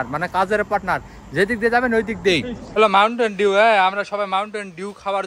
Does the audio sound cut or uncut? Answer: cut